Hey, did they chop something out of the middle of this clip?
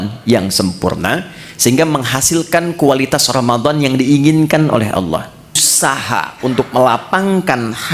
yes; 1 cut; at 5.7 s

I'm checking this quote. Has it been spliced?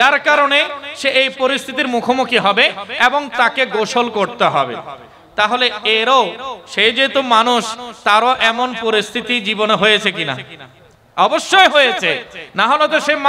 no; 0 cuts

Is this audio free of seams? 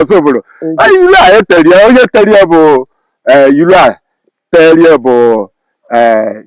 yes; 0 cuts

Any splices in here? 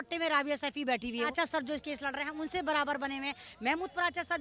yes; 1 cut; at 1.3 s

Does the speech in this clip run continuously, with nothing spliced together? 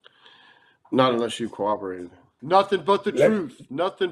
no; 1 cut; at 2.3 s

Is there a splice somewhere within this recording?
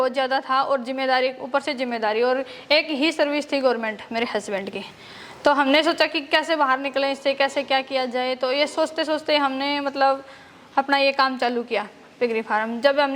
no; 0 cuts

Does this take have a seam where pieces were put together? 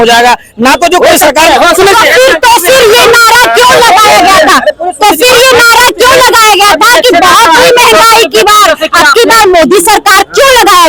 no; 0 cuts

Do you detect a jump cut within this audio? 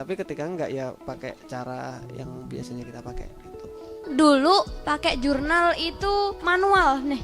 yes; 1 cut; at 4.0 s

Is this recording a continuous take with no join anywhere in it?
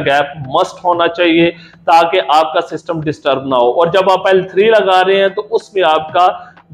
yes; 0 cuts

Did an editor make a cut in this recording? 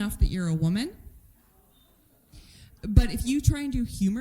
yes; 1 cut; at 2.7 s

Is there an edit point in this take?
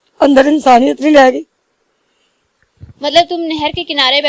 no; 0 cuts

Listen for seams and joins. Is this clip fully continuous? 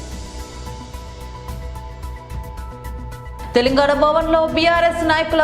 no; 2 cuts; at 1.1 s, 2.0 s

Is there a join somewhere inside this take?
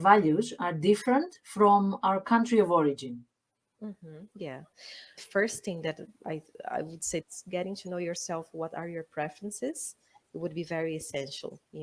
yes; 2 cuts; at 5.2 s, 7.3 s

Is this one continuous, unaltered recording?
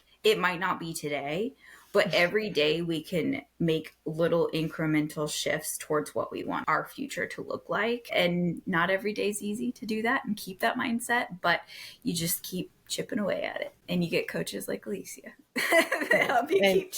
no; 2 cuts; at 6.6 s, 8.1 s

